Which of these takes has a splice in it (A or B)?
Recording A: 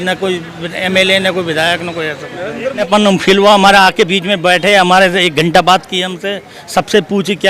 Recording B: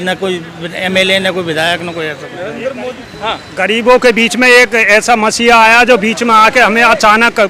A